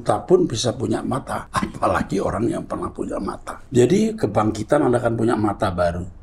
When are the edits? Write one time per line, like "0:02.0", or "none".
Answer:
0:01.4
0:03.5